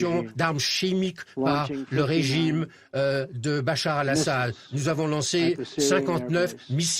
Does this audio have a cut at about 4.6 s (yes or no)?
no